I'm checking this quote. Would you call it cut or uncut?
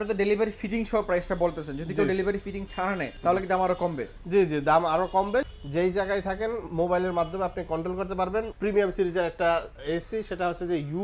cut